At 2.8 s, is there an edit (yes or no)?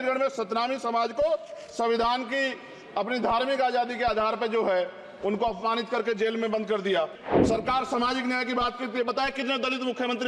no